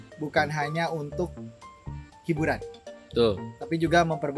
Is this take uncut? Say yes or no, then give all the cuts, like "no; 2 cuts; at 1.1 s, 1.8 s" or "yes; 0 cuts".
yes; 0 cuts